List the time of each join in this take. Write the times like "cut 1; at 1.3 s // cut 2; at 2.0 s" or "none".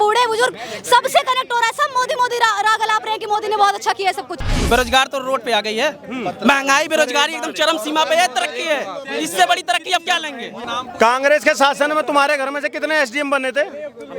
cut 1; at 4.5 s // cut 2; at 10.5 s